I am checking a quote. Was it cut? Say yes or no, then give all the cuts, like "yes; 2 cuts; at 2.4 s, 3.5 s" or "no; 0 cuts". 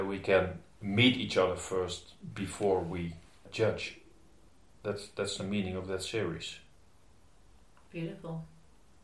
no; 0 cuts